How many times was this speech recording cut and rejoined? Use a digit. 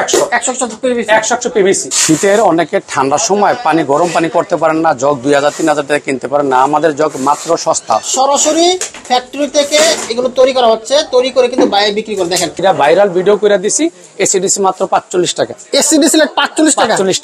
3